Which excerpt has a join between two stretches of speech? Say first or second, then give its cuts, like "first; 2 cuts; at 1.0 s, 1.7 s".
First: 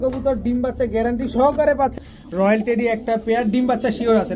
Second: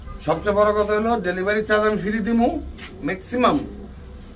first; 1 cut; at 2.0 s